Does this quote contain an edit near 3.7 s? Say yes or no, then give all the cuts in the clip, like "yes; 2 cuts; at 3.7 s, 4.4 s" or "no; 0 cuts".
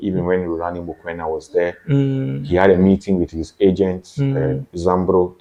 no; 0 cuts